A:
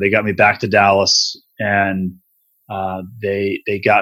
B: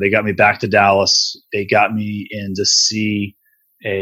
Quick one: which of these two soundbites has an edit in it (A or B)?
B